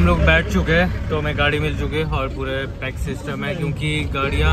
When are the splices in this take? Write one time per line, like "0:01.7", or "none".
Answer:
none